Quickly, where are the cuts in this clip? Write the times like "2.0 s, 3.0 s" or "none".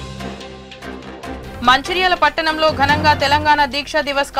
1.0 s